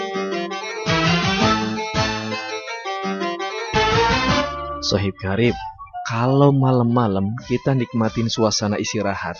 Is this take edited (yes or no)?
yes